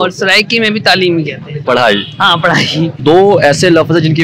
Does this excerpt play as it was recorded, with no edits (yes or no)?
no